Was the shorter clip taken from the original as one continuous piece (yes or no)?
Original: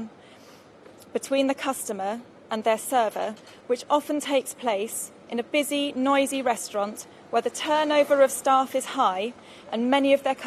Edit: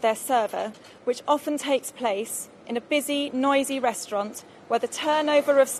yes